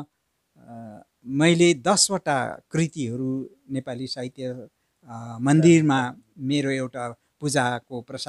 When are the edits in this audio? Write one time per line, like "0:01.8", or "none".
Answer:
none